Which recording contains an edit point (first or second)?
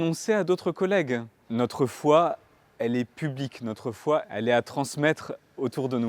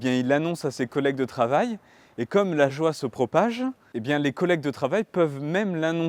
first